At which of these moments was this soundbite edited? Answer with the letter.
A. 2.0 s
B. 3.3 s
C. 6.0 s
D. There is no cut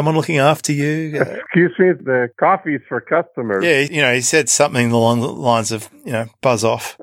D